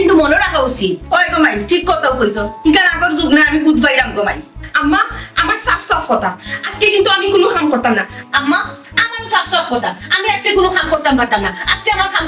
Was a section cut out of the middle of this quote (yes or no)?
yes